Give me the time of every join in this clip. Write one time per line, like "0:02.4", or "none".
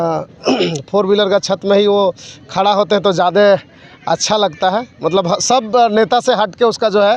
none